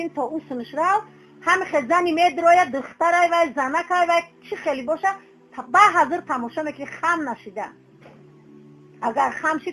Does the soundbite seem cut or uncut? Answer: cut